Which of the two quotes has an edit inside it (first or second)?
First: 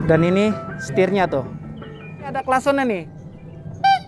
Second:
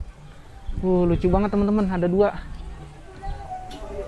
first